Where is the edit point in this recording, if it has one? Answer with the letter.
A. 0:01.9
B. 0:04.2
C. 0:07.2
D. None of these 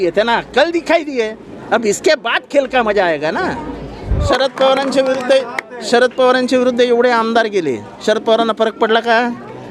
B